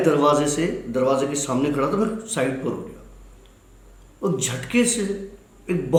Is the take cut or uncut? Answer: uncut